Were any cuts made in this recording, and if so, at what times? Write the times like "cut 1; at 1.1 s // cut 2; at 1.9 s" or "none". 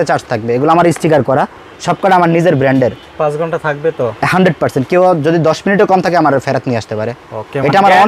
none